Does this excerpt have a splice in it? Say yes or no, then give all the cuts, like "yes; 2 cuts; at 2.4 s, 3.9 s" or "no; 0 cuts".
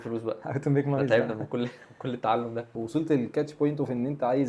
yes; 1 cut; at 2.7 s